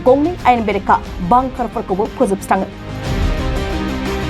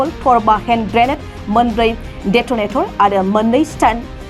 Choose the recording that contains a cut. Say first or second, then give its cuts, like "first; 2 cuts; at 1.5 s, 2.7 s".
first; 1 cut; at 2.8 s